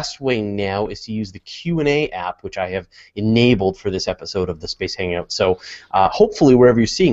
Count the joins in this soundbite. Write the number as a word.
zero